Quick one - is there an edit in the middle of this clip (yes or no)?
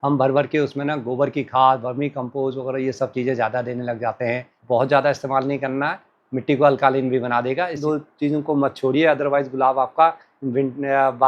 yes